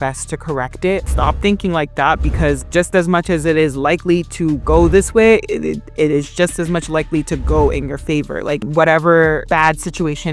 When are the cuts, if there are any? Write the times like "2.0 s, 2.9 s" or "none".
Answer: 1.0 s, 8.6 s